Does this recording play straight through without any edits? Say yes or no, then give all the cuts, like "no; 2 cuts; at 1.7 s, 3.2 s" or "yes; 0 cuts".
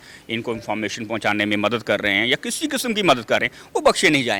yes; 0 cuts